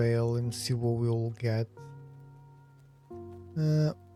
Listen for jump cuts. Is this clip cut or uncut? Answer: uncut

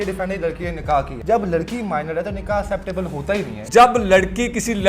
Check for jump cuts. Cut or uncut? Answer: cut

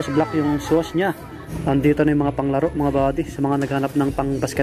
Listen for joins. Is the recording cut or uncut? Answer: cut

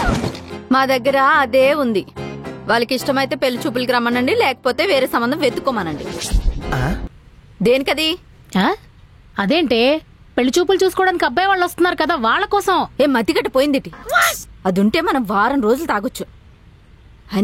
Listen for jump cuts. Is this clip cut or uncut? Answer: cut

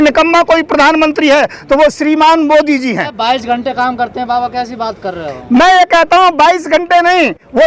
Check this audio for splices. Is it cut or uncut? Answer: uncut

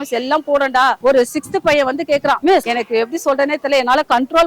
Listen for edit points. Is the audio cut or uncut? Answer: cut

